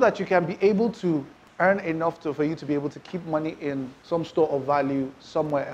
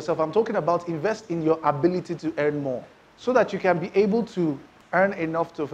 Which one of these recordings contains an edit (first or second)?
first